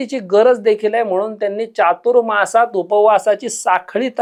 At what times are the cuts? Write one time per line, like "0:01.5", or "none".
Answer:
none